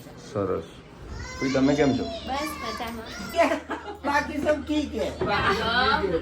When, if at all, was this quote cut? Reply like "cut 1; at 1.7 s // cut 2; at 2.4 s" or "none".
cut 1; at 3.3 s